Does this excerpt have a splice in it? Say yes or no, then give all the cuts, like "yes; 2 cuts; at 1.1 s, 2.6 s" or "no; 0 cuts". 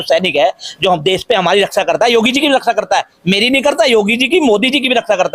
no; 0 cuts